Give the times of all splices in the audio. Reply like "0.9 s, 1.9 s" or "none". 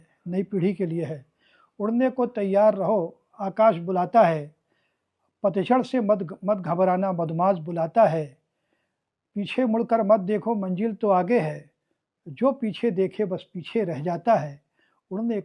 none